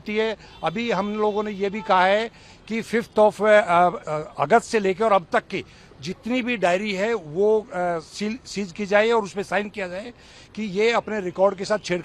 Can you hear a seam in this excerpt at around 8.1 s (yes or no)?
no